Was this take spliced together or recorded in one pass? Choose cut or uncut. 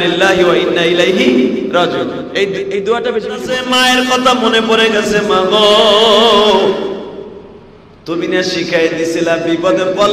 cut